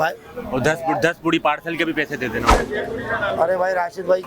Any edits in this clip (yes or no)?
yes